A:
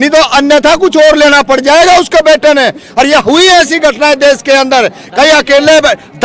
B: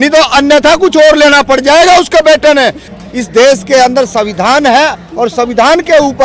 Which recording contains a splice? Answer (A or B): B